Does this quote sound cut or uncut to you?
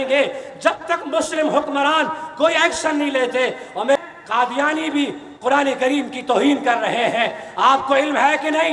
cut